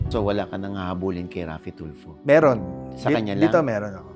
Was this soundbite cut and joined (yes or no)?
no